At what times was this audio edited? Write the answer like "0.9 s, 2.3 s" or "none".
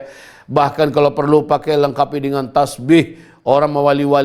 none